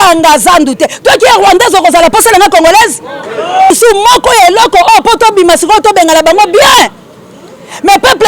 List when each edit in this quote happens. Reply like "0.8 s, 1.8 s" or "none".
3.7 s